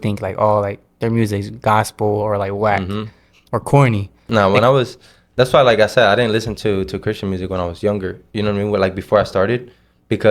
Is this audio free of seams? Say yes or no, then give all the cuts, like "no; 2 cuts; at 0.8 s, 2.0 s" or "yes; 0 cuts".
no; 1 cut; at 4.2 s